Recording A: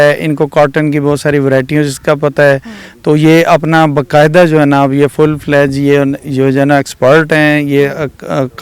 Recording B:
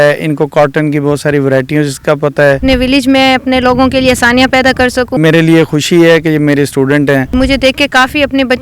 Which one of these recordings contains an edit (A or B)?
B